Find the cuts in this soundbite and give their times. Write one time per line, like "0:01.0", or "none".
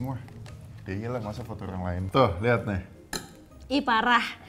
0:02.0